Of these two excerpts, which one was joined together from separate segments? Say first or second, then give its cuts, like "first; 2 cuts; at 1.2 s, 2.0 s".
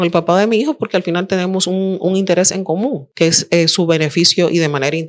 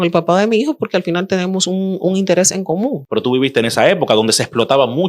second; 1 cut; at 3.0 s